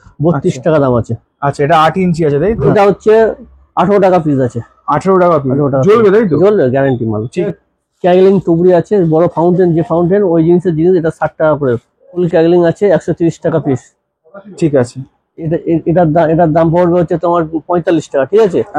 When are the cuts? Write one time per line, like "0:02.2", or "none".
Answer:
0:02.7
0:07.5
0:12.1
0:15.3